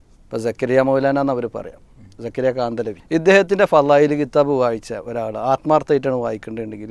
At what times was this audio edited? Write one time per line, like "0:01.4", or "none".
0:03.0